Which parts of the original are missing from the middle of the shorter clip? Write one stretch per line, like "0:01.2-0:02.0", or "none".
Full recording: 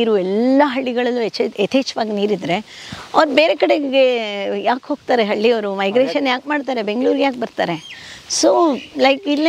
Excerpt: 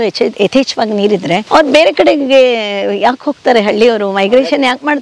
0:02.6-0:03.1